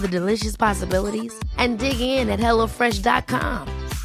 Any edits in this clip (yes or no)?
no